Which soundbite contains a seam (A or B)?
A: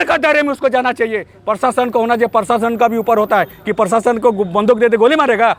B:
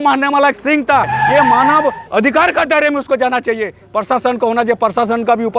B